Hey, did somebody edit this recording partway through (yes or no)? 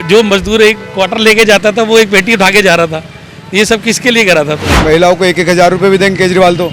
yes